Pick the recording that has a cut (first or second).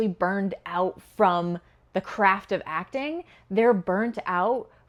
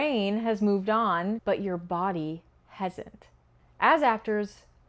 second